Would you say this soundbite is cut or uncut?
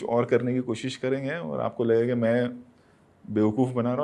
uncut